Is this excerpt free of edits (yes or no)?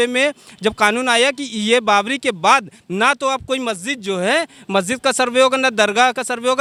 yes